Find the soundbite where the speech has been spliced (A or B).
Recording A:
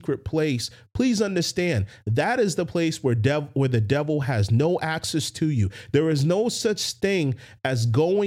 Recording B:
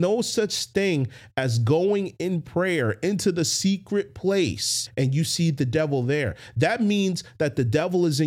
B